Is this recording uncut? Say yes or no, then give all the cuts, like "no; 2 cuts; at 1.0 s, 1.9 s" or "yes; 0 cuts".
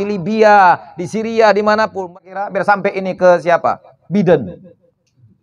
no; 1 cut; at 2.0 s